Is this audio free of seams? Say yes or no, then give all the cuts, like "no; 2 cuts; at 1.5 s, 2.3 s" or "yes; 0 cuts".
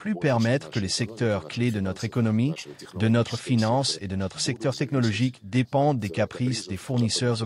yes; 0 cuts